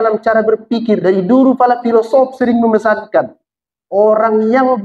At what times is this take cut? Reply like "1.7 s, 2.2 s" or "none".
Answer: 1.0 s

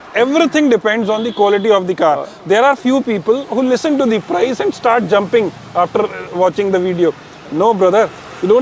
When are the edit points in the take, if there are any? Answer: none

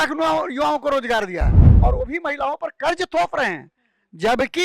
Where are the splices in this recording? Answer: 1.6 s

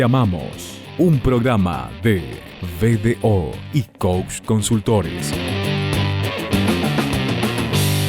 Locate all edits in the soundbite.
5.2 s

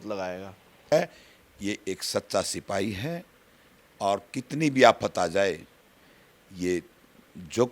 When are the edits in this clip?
0.9 s

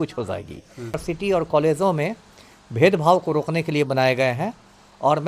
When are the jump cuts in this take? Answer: 1.0 s

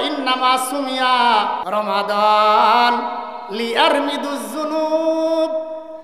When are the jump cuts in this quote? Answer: 1.6 s

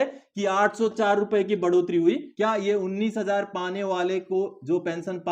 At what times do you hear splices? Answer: 2.3 s

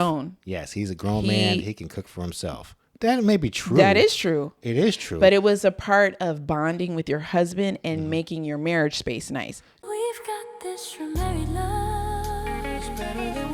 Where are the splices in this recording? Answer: 9.8 s

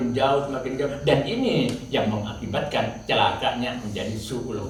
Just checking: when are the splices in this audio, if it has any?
none

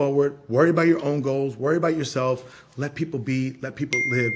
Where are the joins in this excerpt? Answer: none

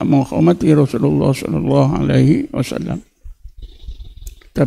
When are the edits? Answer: none

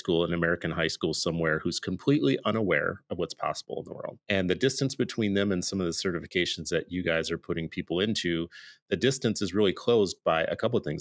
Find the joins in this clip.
4.1 s

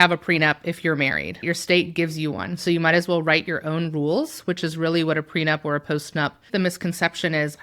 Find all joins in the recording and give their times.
1.4 s, 6.5 s

